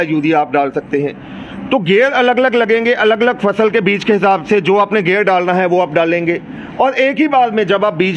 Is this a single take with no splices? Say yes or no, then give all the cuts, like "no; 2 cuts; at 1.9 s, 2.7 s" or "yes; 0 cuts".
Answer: yes; 0 cuts